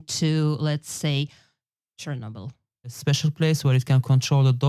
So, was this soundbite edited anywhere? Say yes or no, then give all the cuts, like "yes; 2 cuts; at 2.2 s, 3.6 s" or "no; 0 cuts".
yes; 1 cut; at 3.0 s